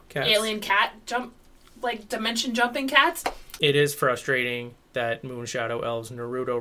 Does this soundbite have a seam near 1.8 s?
no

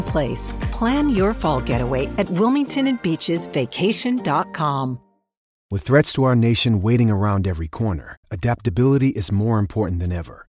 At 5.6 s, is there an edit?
yes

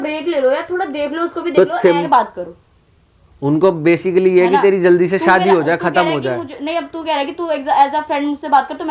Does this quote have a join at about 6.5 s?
no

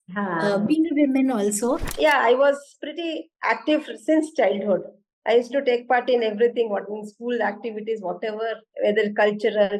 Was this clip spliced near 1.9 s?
yes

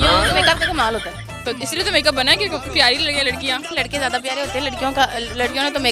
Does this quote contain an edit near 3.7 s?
yes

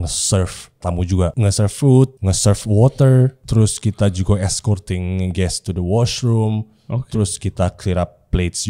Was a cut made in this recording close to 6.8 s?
no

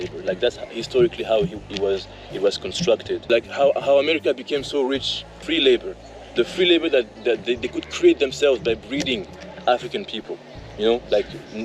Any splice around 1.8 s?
no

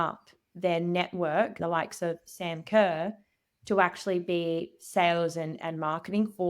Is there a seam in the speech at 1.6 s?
yes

